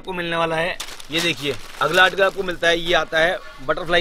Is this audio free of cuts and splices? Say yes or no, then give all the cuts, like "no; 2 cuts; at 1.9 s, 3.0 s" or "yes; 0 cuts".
no; 1 cut; at 0.9 s